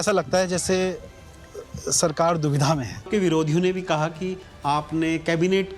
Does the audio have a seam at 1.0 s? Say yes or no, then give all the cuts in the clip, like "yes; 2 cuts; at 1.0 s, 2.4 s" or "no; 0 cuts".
no; 1 cut; at 3.1 s